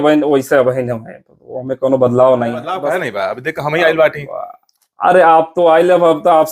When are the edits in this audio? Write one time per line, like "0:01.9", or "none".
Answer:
0:02.7